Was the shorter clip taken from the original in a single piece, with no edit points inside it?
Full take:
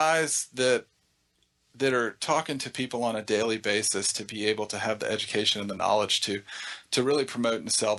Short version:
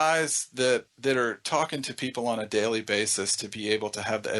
no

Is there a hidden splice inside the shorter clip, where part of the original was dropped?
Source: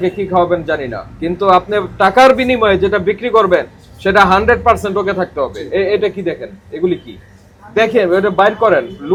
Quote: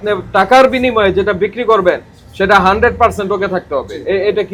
no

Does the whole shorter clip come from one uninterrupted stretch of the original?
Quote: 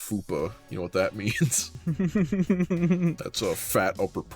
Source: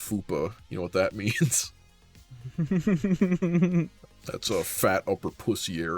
no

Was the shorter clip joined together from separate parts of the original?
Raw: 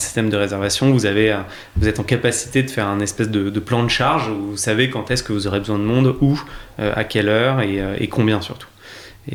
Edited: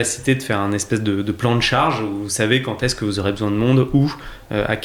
no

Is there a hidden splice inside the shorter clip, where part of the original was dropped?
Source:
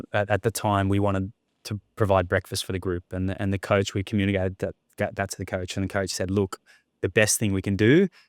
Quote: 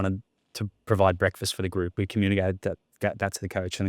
yes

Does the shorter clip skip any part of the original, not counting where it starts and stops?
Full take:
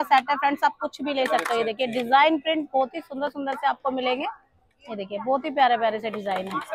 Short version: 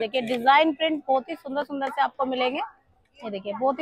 no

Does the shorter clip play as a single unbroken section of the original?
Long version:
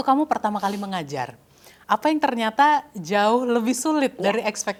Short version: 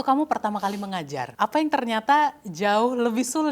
no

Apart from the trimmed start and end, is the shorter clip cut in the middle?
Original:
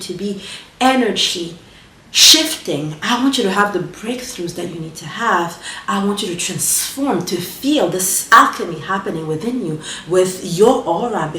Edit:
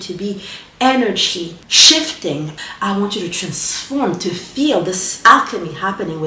yes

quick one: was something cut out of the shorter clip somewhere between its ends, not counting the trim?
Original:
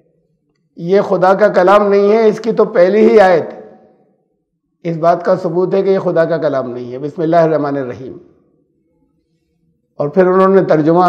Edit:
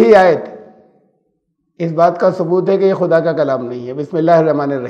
no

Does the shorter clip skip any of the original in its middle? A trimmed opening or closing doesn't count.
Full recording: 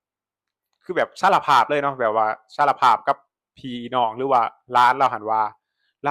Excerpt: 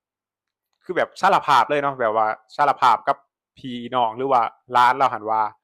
no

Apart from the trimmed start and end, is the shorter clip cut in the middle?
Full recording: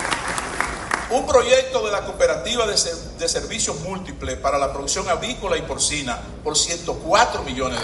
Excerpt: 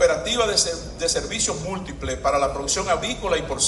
no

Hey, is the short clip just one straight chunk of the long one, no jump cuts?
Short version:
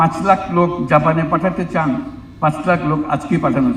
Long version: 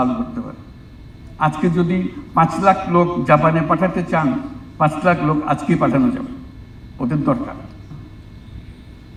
yes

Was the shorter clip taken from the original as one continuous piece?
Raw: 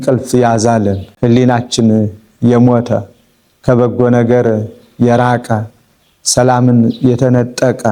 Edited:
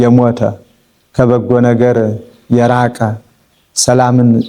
yes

